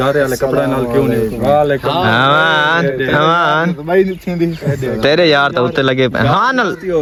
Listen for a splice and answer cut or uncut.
uncut